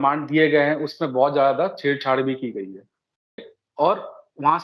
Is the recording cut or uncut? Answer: cut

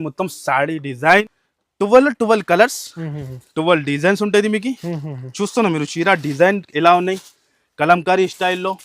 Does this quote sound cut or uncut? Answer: cut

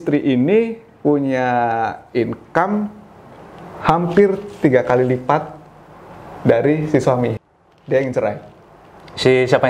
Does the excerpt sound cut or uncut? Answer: cut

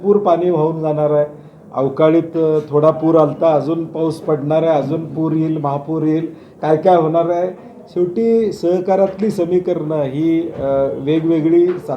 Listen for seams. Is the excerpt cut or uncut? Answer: uncut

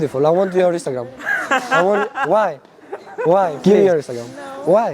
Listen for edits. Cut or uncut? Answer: cut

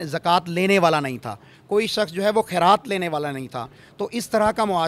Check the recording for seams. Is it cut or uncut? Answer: uncut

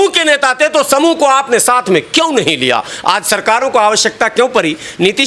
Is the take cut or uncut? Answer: uncut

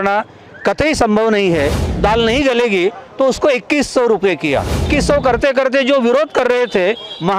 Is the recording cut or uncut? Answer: cut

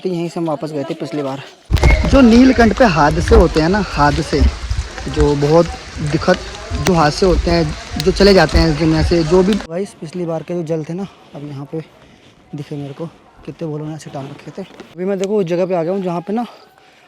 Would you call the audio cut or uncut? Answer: cut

